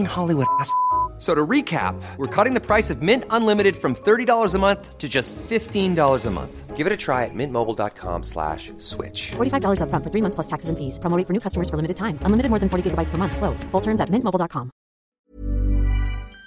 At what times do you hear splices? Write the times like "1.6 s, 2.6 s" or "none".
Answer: 15.2 s